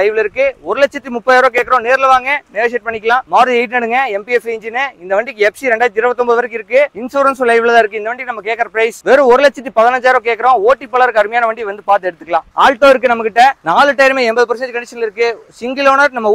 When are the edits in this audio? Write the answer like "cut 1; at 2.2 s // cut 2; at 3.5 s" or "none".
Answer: cut 1; at 3.3 s // cut 2; at 12.5 s // cut 3; at 13.6 s

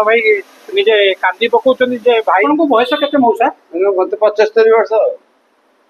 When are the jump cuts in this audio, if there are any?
cut 1; at 2.4 s

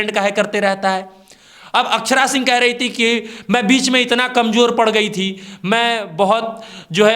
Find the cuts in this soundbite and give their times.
none

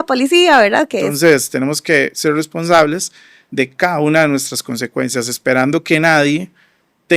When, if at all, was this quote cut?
cut 1; at 1.1 s

